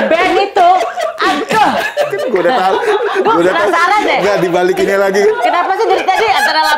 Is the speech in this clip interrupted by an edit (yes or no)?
yes